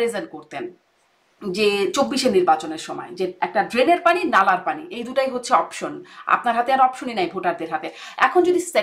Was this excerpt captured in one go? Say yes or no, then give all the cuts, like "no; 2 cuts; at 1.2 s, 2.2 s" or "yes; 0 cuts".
yes; 0 cuts